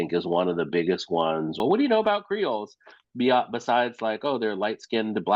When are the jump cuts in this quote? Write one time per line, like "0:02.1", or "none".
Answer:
0:01.6

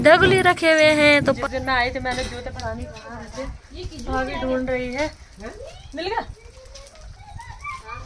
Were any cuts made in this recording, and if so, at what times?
0:01.4

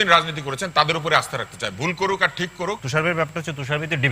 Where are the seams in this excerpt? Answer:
0:02.8

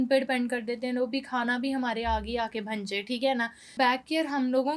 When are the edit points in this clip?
0:03.7

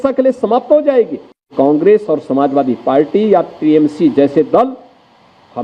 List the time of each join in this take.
0:01.5

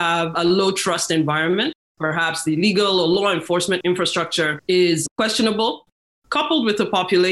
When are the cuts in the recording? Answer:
0:01.8
0:04.1
0:05.9

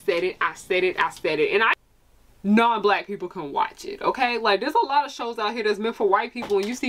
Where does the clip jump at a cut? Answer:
0:01.7

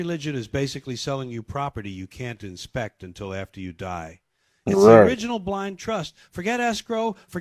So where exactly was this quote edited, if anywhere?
none

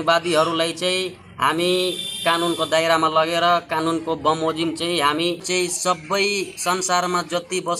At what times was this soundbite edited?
0:05.4

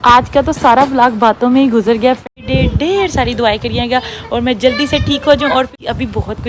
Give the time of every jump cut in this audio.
0:02.2
0:05.7

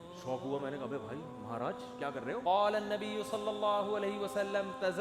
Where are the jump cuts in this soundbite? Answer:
0:02.4

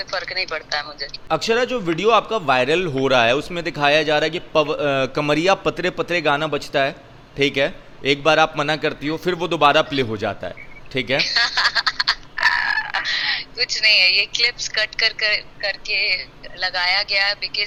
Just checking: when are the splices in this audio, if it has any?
none

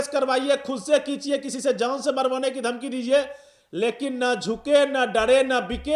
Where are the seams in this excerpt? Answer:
none

